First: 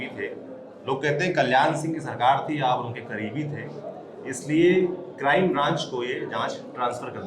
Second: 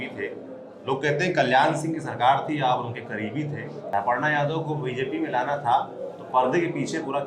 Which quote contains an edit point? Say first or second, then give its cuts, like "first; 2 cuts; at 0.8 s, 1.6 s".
second; 1 cut; at 3.9 s